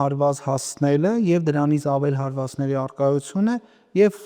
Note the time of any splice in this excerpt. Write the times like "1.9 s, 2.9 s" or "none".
none